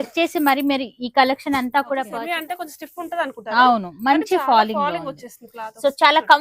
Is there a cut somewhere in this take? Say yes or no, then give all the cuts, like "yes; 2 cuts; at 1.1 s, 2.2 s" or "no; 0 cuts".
yes; 1 cut; at 2.1 s